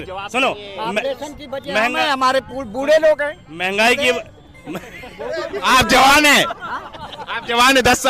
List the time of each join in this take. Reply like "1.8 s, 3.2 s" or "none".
7.0 s